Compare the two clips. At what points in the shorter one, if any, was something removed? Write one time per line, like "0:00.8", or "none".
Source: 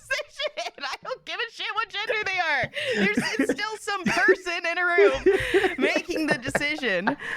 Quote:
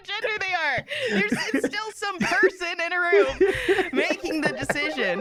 none